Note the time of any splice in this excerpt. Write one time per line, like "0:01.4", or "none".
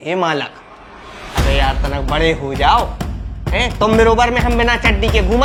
none